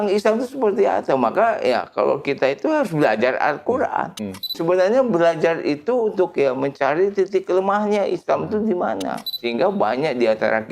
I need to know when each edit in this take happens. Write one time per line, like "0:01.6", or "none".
0:04.6
0:09.4